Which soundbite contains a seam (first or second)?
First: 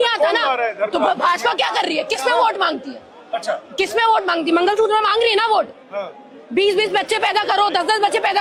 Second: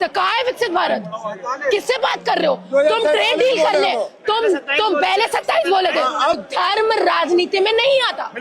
second